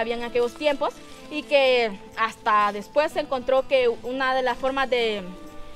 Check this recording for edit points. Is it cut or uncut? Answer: uncut